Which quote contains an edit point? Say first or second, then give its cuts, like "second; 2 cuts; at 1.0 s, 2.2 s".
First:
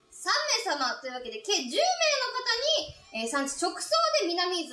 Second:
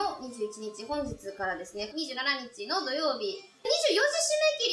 second; 1 cut; at 3.7 s